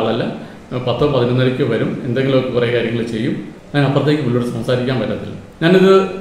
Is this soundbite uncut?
yes; 0 cuts

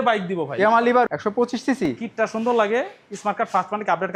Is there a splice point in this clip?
no; 0 cuts

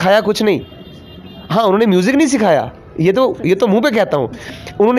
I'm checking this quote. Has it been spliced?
no; 0 cuts

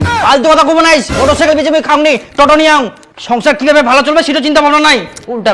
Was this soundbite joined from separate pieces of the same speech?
no; 0 cuts

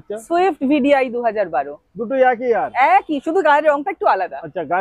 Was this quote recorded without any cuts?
yes; 0 cuts

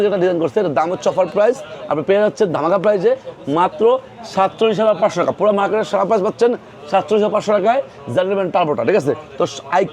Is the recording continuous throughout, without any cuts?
yes; 0 cuts

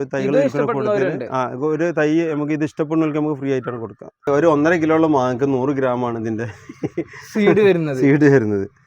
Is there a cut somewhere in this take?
yes; 1 cut; at 4.3 s

